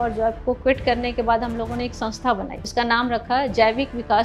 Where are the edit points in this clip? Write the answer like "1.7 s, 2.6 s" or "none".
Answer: none